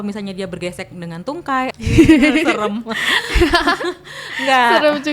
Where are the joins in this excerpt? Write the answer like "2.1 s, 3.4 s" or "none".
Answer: 1.7 s